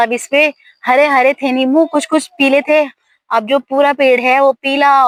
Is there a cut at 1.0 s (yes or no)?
no